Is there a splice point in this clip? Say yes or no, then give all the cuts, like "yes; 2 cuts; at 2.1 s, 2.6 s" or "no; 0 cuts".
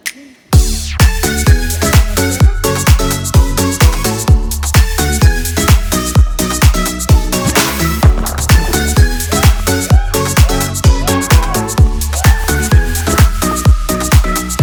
no; 0 cuts